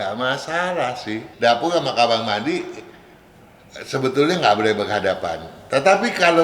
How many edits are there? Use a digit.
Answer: 1